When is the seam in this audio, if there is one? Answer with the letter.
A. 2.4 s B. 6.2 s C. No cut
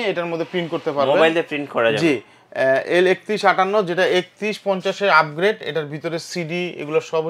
C